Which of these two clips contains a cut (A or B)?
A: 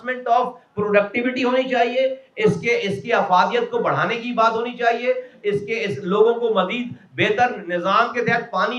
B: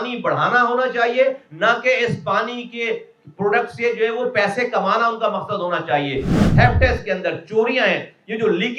B